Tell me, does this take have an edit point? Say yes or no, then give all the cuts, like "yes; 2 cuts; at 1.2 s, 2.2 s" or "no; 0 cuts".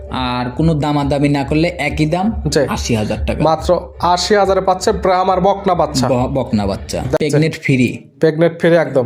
yes; 1 cut; at 7.2 s